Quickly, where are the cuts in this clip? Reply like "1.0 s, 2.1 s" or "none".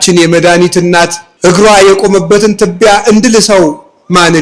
1.2 s